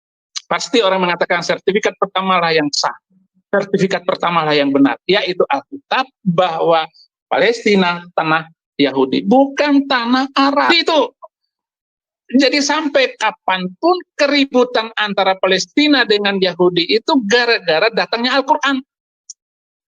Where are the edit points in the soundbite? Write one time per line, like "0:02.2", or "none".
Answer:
0:10.7